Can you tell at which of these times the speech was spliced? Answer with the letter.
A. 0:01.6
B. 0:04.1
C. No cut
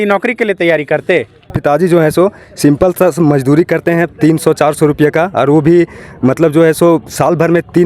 A